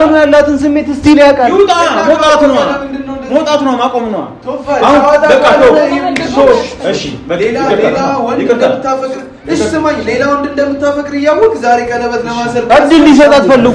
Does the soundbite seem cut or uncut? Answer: uncut